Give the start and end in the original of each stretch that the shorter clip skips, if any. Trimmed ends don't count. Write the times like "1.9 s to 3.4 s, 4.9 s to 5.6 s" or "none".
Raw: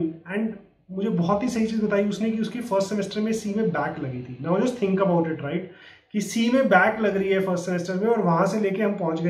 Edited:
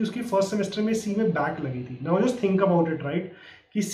none